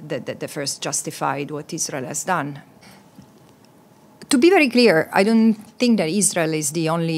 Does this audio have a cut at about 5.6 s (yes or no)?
no